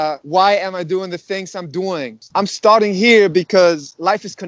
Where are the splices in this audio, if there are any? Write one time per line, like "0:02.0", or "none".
0:02.2